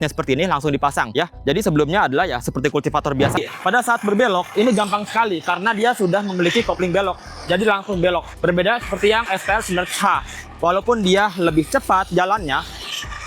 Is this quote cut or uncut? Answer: cut